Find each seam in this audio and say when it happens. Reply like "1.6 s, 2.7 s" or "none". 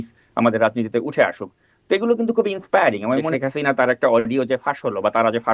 3.3 s